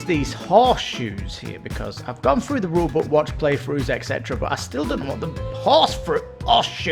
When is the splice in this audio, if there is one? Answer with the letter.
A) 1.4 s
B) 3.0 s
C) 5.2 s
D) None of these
D